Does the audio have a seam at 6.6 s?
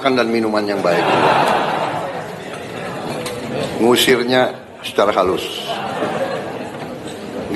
no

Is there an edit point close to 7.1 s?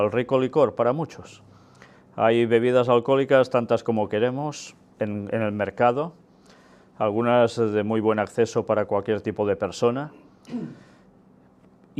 yes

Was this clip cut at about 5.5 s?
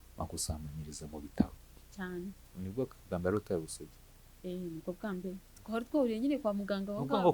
yes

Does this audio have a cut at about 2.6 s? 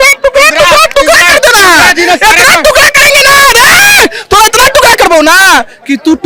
no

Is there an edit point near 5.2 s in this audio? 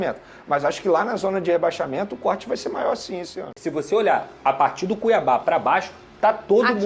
no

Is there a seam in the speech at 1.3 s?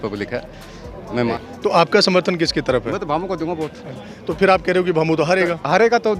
yes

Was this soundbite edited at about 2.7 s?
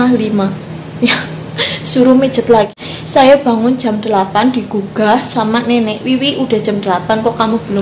yes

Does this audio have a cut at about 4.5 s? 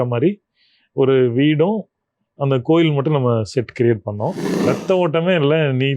yes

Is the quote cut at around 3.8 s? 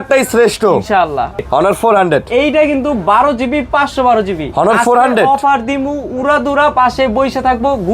no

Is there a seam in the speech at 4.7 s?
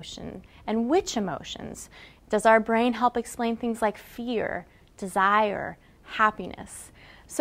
no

